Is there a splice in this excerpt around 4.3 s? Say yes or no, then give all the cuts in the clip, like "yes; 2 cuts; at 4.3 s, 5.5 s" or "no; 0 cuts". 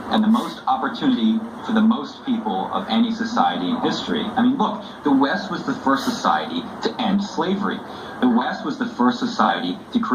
yes; 1 cut; at 4.3 s